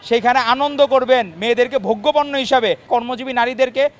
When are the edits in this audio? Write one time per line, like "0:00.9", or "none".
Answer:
0:02.8